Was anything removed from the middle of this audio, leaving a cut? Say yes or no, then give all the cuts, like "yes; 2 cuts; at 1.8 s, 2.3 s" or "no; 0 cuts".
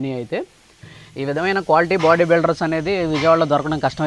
no; 0 cuts